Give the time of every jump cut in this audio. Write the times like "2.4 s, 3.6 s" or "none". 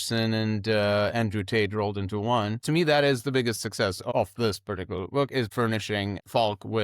2.6 s, 4.0 s, 5.7 s